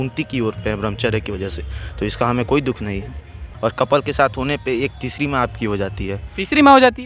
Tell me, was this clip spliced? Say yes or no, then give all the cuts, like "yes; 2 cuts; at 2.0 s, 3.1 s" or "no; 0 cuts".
yes; 1 cut; at 3.4 s